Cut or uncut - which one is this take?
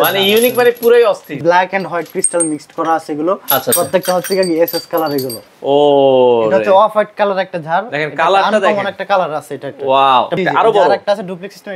cut